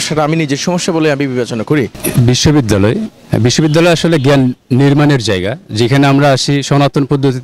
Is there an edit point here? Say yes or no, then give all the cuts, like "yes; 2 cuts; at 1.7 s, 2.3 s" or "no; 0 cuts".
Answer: yes; 1 cut; at 2.0 s